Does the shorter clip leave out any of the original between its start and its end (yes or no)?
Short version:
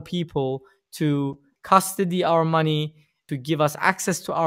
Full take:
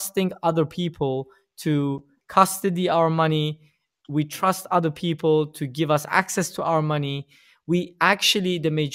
yes